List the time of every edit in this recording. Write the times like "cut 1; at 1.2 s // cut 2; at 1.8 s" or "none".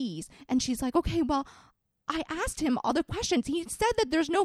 none